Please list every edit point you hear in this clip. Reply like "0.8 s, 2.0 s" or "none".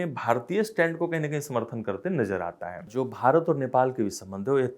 2.9 s